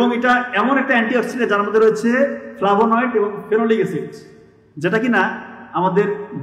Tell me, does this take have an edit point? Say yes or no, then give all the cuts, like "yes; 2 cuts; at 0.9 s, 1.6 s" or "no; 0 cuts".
no; 0 cuts